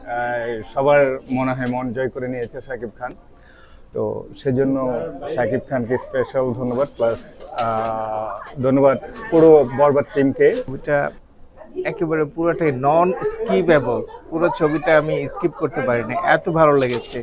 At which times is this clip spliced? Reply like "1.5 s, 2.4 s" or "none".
10.7 s